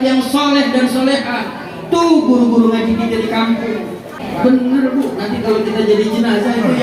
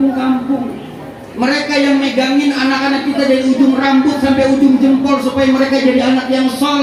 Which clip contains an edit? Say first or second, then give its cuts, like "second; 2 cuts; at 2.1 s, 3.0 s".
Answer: first; 1 cut; at 4.2 s